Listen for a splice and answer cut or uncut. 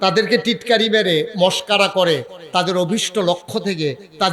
uncut